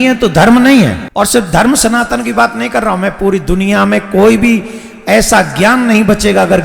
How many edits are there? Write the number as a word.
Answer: one